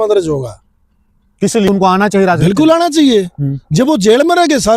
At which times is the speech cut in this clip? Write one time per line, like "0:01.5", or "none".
0:01.7